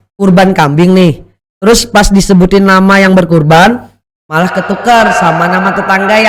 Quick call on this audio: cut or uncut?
uncut